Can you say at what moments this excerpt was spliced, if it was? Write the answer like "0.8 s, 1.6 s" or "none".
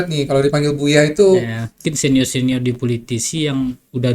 1.8 s